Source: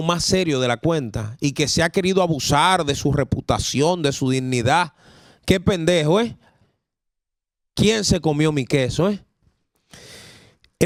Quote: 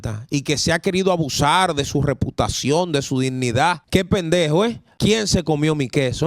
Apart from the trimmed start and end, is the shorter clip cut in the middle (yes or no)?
yes